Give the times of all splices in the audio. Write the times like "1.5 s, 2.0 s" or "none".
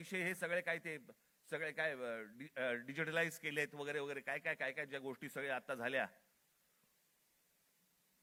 none